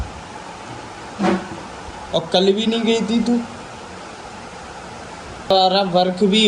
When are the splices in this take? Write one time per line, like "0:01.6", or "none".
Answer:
0:05.5

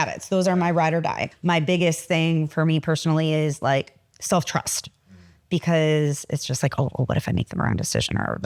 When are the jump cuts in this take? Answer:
0:01.3

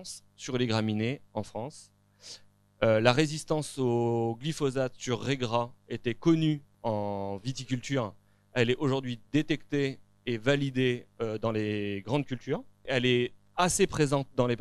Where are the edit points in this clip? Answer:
0:06.7
0:12.9

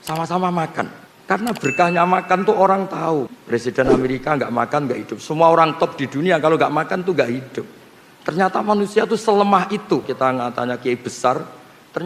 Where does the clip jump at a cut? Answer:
0:01.1
0:03.4
0:10.1

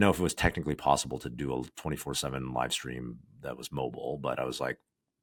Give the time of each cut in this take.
none

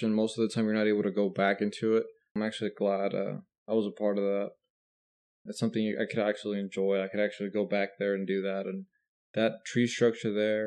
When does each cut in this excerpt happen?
0:02.4

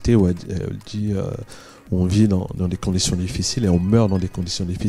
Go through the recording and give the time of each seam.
none

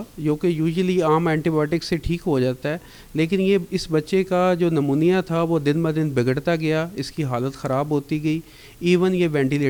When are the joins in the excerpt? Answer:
none

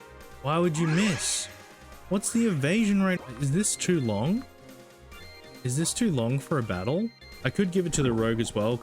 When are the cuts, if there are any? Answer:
0:03.2
0:07.3

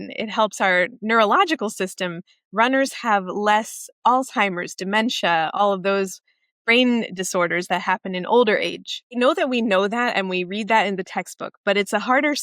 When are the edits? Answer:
0:09.1

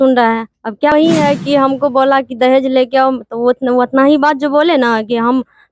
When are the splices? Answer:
0:00.9

